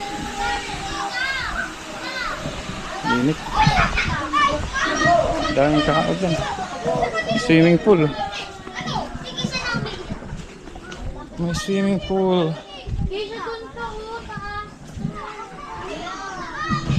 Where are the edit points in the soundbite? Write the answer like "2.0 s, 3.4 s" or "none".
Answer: none